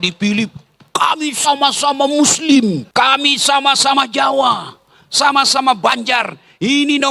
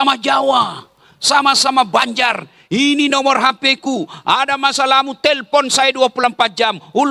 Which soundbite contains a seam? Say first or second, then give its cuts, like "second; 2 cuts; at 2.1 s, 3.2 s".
first; 1 cut; at 2.8 s